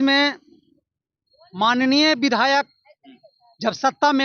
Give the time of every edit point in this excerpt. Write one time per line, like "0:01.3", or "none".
none